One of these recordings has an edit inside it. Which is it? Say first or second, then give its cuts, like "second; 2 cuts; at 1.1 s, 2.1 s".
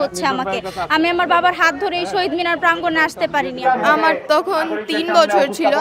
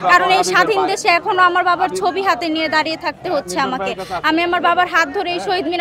first; 1 cut; at 3.5 s